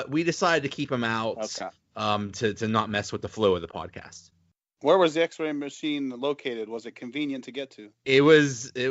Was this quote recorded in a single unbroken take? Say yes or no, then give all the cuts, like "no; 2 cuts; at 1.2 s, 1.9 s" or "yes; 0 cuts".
yes; 0 cuts